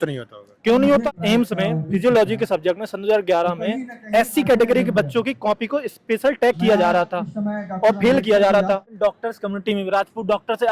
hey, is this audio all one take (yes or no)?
no